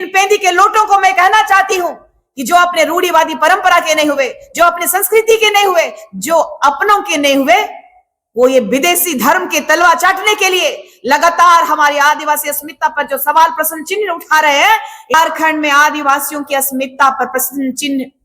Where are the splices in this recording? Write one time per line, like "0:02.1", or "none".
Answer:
0:15.1